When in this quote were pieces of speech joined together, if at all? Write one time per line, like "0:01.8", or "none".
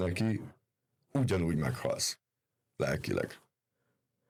none